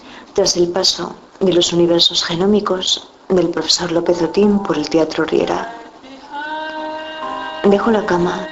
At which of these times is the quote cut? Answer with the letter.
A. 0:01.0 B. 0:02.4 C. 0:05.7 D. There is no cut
B